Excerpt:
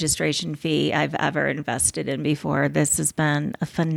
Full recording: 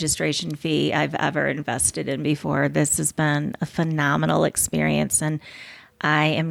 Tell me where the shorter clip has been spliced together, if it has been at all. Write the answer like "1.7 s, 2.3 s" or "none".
none

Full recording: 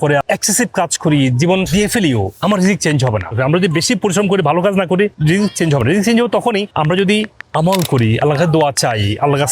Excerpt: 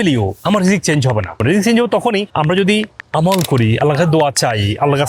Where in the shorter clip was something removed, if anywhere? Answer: 1.4 s

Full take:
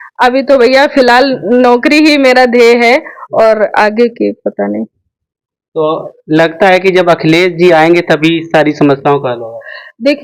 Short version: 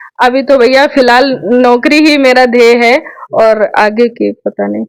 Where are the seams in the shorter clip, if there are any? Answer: none

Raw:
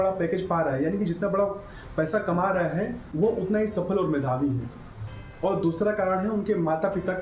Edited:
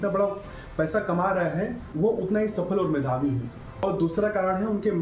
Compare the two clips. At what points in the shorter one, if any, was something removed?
3.6 s

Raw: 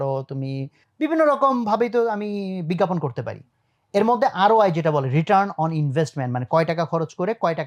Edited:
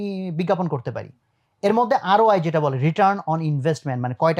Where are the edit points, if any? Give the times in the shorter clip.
none

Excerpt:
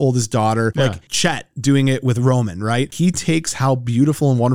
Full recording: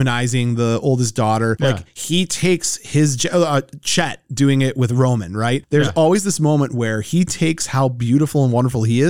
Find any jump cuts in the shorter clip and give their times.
1.1 s, 2.9 s

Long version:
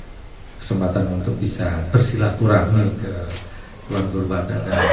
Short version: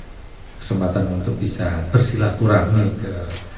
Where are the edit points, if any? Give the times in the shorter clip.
none

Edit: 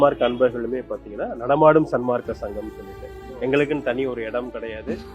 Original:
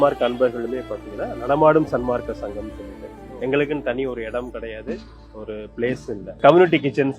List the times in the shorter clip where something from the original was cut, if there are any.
none

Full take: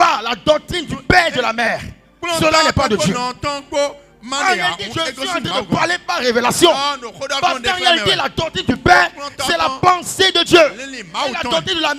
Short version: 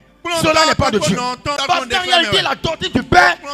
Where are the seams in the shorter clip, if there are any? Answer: 1.5 s

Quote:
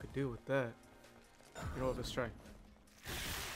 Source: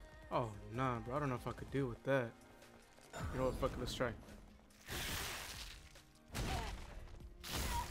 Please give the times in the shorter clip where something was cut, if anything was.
2.0 s

